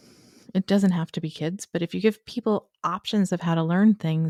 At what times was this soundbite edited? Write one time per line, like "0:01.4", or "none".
none